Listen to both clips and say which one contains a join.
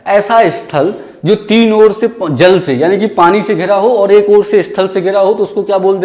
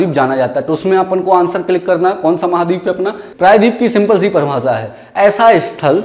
second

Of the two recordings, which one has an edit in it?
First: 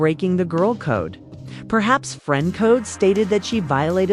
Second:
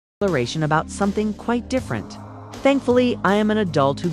second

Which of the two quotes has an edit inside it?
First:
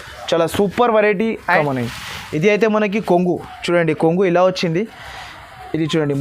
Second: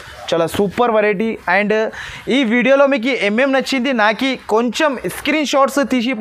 first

